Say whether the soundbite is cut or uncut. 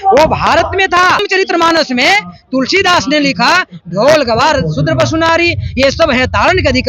cut